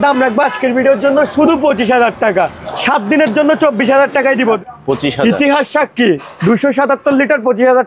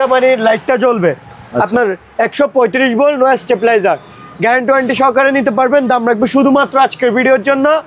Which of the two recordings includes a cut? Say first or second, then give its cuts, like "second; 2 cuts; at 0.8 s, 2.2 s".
first; 2 cuts; at 2.6 s, 4.6 s